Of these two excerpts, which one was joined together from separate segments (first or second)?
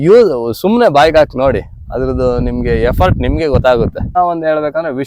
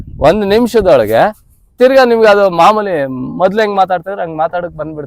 first